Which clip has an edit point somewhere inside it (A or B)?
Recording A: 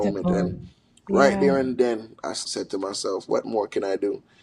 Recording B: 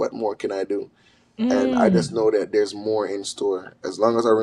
A